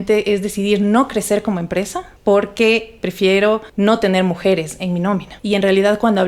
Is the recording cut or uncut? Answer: cut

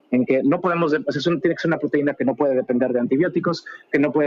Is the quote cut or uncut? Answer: uncut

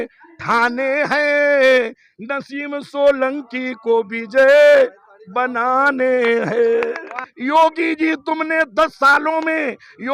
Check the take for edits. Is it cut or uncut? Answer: cut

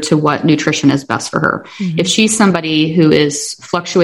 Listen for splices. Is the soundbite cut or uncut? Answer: uncut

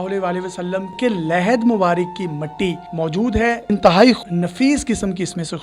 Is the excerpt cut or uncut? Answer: cut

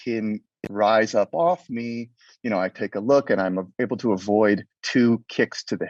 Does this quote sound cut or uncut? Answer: uncut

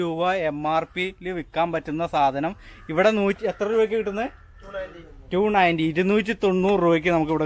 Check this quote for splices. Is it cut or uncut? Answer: uncut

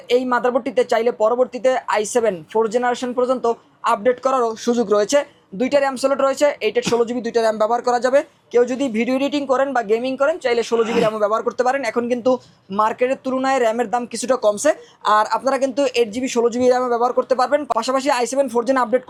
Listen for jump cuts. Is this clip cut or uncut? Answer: uncut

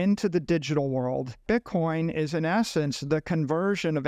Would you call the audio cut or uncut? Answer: cut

